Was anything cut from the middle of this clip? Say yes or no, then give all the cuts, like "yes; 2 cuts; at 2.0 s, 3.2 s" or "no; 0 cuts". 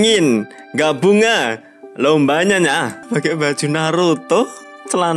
yes; 1 cut; at 3.0 s